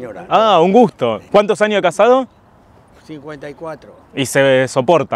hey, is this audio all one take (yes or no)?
yes